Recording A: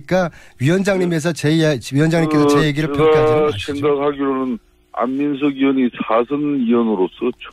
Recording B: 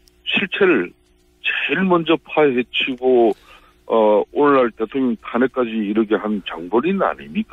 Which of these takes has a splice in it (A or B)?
A